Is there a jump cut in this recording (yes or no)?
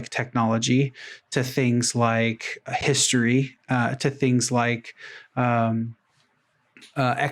no